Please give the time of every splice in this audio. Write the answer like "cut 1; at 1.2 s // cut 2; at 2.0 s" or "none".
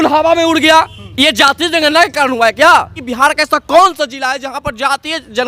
cut 1; at 1.0 s // cut 2; at 3.0 s